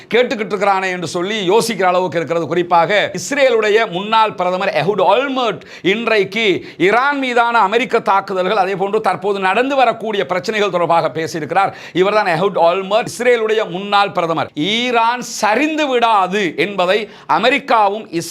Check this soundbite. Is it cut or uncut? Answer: cut